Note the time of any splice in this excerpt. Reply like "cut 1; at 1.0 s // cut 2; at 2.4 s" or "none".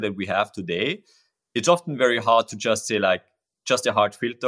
none